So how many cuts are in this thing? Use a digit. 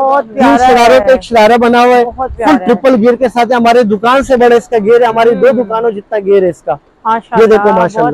0